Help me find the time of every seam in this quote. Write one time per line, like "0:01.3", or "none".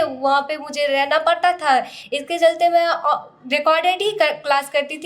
none

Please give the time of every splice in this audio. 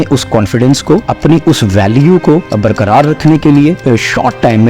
0:01.1
0:02.5
0:03.8

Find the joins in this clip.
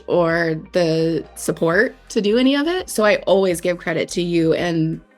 0:02.9
0:04.1

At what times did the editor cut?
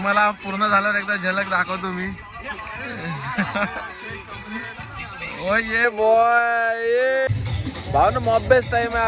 0:07.3

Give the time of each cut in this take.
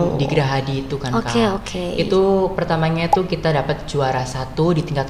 none

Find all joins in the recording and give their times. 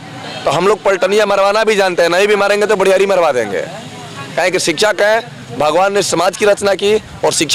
none

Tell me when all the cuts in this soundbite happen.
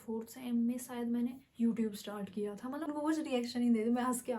0:02.9

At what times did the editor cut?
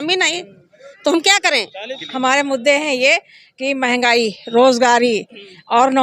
0:02.0

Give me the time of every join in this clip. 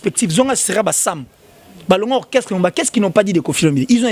none

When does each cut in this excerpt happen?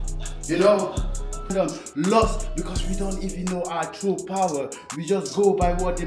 0:01.5

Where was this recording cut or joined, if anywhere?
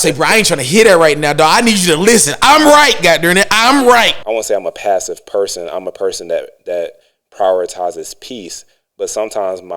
0:04.2

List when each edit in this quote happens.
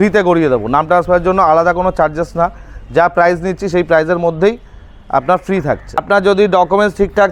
0:06.0

